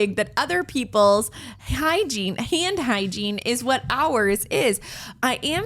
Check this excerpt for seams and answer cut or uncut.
uncut